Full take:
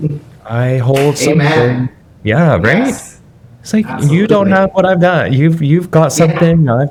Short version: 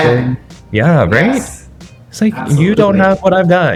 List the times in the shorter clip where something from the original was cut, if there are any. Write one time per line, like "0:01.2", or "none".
none